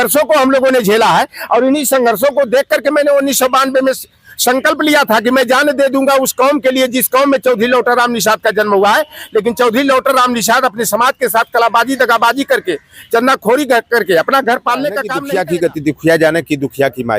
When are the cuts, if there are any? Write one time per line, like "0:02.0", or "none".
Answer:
0:15.1